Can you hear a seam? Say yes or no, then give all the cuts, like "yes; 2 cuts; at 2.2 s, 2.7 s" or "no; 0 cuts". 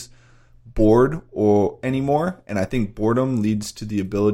no; 0 cuts